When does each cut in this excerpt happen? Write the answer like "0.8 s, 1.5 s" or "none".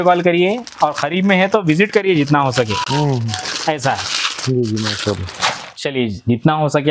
none

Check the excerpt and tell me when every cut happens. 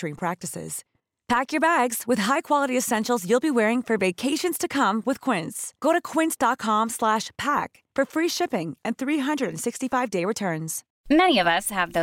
10.8 s

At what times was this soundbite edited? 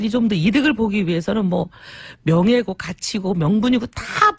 3.5 s

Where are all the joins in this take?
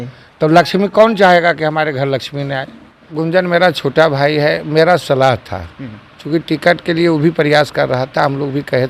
3.1 s

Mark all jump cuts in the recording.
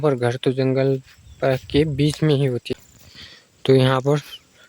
2.7 s

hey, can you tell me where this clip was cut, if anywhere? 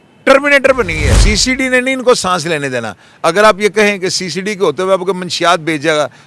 1.1 s

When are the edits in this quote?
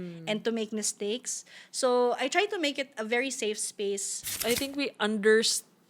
4.3 s

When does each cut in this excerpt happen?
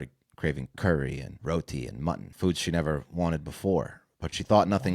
1.3 s, 2.3 s

